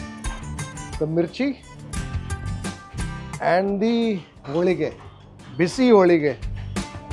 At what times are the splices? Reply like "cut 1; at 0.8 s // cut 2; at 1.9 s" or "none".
none